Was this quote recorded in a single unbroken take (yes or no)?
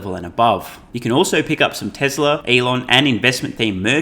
no